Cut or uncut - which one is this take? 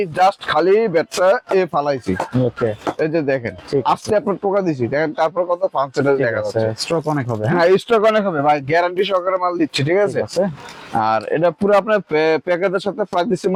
uncut